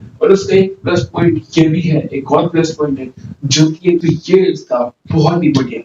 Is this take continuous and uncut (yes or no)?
no